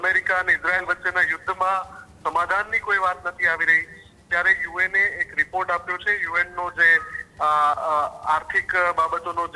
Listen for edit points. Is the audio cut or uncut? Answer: uncut